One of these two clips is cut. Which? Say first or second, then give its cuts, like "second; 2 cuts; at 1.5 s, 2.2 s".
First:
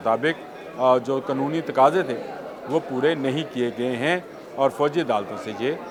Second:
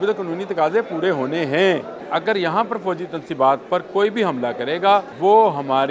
second; 2 cuts; at 2.0 s, 5.1 s